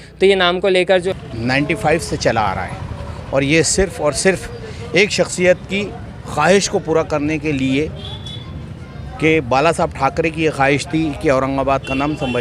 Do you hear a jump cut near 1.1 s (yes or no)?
yes